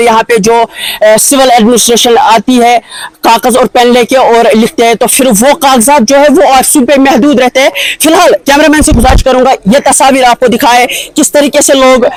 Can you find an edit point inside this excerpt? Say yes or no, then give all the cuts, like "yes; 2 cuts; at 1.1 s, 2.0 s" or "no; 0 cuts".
no; 0 cuts